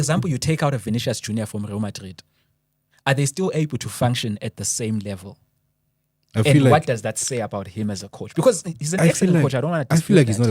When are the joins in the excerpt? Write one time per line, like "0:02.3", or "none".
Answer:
none